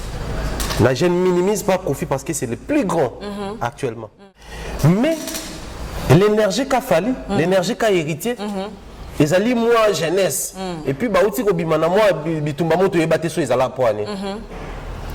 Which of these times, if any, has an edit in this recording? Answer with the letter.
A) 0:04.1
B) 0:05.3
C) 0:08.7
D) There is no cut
A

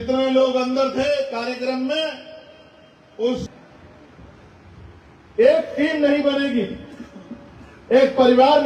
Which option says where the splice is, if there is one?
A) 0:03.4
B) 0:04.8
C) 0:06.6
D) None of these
A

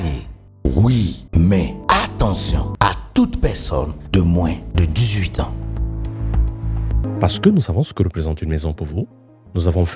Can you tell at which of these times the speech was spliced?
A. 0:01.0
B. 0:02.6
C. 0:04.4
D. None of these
B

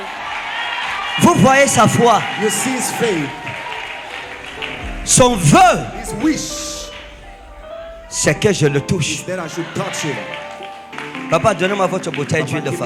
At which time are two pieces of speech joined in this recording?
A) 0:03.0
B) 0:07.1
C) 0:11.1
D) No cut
D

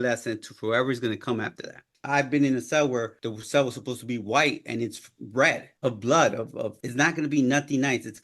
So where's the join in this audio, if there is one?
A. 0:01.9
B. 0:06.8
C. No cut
A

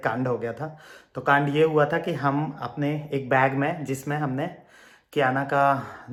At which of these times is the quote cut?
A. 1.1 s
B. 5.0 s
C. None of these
C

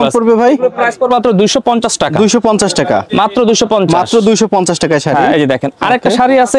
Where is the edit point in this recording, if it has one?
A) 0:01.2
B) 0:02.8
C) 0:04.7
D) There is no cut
D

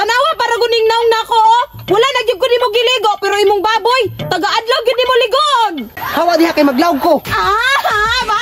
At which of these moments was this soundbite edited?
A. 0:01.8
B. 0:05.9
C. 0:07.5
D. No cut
B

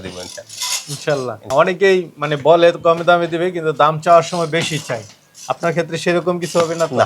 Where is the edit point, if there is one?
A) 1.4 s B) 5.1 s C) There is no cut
A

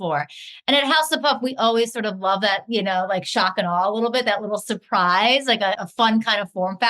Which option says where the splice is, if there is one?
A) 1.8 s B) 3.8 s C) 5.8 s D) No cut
C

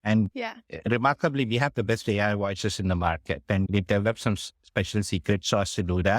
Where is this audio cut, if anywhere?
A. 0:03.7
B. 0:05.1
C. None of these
A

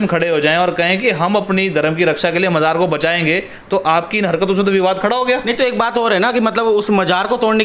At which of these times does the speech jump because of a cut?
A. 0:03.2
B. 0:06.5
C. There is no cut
C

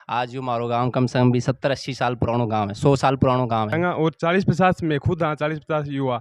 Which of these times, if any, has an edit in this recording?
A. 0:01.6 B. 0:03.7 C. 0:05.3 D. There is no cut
B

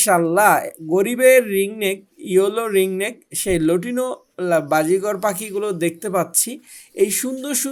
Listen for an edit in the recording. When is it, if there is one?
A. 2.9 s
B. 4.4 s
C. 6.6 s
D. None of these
D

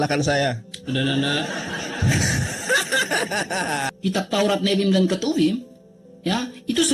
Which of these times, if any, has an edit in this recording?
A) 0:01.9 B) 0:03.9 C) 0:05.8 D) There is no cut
B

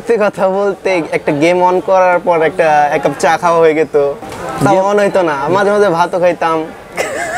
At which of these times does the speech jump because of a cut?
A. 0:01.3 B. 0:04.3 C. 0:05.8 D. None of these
B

